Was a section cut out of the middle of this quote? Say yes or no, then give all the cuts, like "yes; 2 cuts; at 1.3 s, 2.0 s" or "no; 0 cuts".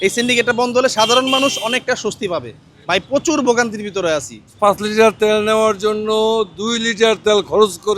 yes; 1 cut; at 4.5 s